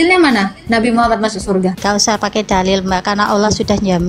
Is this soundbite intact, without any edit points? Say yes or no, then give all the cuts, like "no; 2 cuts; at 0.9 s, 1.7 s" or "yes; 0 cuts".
no; 1 cut; at 1.8 s